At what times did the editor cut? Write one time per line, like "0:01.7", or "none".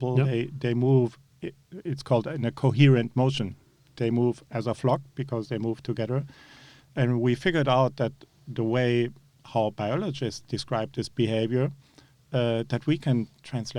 none